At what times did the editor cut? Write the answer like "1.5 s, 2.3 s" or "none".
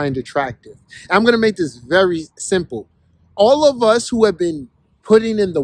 none